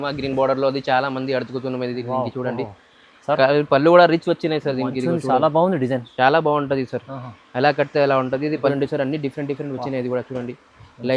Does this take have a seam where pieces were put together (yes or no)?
yes